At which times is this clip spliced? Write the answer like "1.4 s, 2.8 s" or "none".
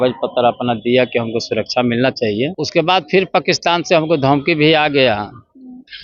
2.5 s

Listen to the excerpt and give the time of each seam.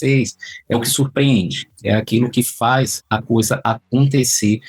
none

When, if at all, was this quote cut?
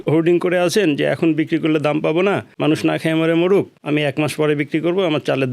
2.5 s, 3.8 s

